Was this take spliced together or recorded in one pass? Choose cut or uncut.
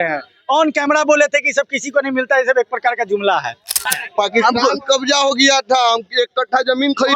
cut